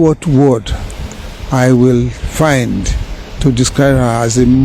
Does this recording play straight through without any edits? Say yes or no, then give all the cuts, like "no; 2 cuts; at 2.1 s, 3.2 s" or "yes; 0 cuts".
yes; 0 cuts